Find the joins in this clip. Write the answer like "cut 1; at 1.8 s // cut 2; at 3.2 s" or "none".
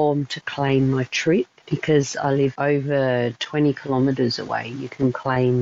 cut 1; at 1.6 s // cut 2; at 2.6 s